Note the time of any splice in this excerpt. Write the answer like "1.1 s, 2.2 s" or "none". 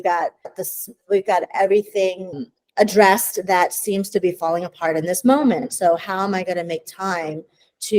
5.7 s

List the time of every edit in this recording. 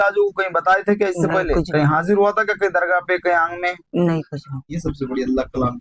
4.8 s

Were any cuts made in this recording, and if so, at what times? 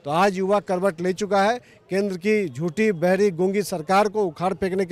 none

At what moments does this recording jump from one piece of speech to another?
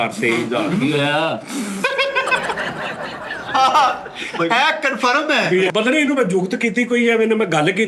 5.7 s

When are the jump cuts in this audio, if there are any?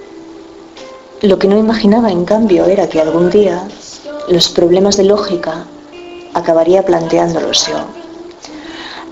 5.0 s

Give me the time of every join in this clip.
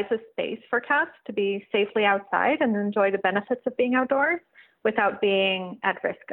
none

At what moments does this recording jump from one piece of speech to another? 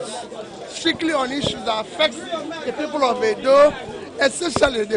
none

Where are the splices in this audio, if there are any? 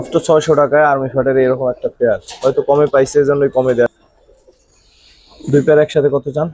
3.9 s

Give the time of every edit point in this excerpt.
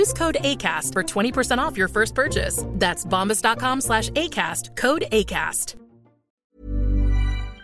6.4 s

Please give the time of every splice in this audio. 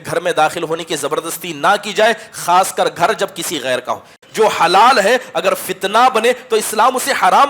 4.2 s

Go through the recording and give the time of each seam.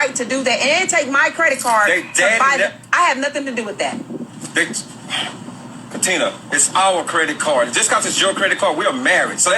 7.8 s

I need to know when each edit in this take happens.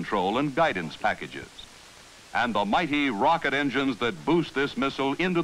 4.2 s

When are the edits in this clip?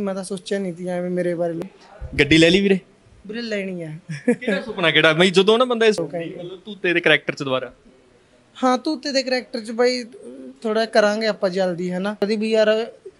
1.6 s, 6.0 s, 12.2 s

